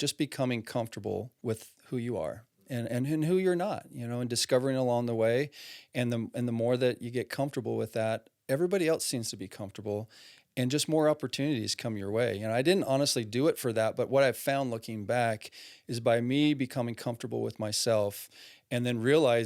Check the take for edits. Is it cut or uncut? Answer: cut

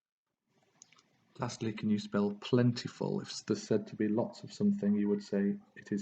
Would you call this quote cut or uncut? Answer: cut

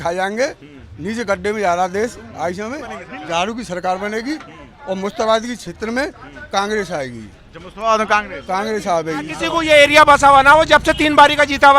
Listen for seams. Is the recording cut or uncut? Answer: cut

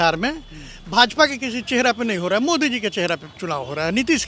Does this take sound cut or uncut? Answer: uncut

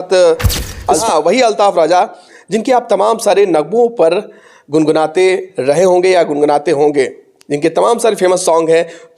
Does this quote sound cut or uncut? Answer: cut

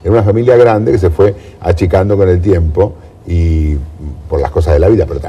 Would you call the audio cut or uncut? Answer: cut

